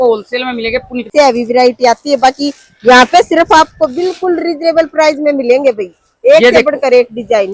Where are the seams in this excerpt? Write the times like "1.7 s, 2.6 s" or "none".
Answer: 1.1 s